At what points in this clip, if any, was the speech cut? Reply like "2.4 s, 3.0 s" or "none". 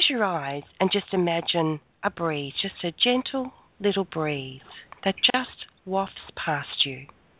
1.9 s